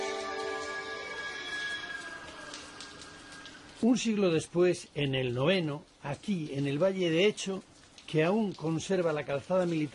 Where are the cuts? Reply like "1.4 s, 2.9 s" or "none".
none

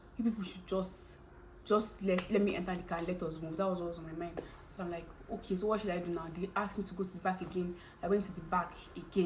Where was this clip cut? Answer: none

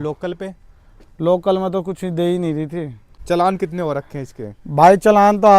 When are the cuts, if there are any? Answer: 3.1 s

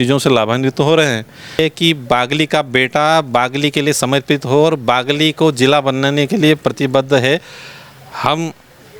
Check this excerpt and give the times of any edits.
1.5 s

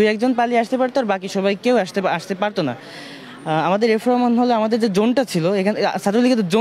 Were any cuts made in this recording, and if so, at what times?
none

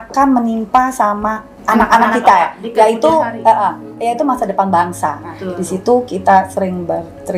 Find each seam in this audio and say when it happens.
1.5 s

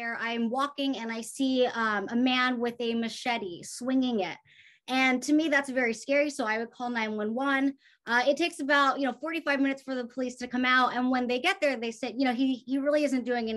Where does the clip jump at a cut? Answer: none

